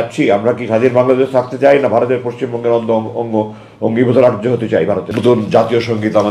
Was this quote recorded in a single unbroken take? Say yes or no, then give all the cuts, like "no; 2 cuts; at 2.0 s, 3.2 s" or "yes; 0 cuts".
no; 1 cut; at 5.1 s